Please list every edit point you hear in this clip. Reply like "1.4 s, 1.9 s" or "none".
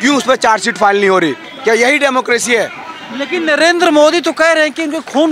1.5 s